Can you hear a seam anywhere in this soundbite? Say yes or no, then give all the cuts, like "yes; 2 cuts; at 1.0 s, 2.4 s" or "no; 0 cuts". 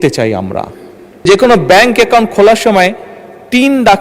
yes; 1 cut; at 1.2 s